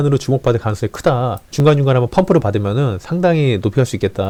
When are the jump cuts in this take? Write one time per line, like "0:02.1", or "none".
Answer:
none